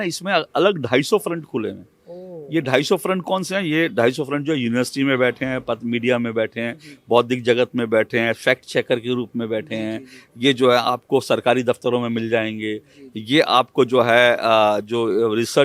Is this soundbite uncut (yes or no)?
yes